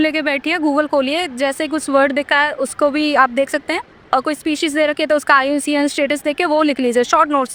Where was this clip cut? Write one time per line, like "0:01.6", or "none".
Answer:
none